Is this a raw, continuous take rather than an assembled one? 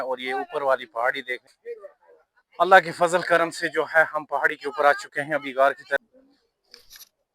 no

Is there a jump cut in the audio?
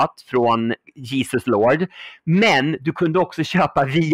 yes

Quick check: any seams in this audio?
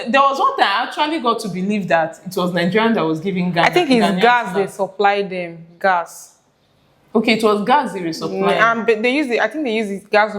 no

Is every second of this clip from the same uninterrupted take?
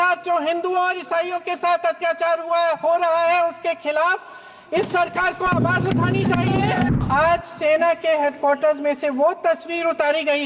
no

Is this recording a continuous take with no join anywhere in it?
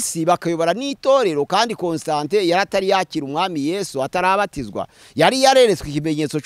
yes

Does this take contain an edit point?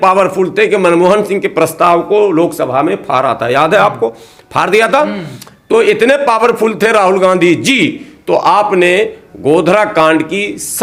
no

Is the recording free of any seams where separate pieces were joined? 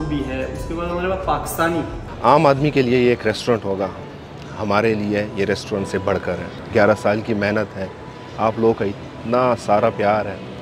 no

